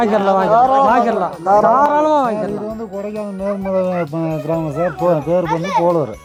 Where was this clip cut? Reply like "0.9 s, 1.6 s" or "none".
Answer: none